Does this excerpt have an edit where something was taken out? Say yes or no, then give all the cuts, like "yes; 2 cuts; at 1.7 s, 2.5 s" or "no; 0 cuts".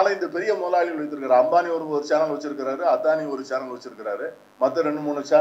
yes; 1 cut; at 4.4 s